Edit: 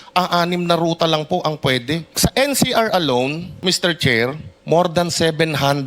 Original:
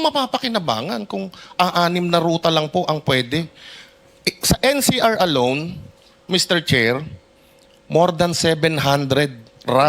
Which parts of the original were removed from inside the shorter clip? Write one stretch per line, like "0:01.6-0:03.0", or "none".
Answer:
0:03.5-0:04.4
0:05.7-0:06.1
0:07.2-0:07.7